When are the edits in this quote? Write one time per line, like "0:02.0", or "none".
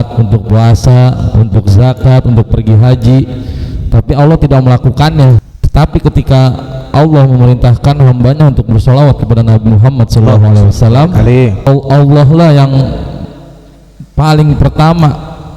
0:05.5
0:11.7